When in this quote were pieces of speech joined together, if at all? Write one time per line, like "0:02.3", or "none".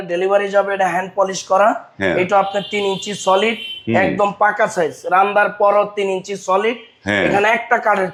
none